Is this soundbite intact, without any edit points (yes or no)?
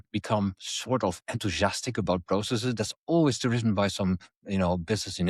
yes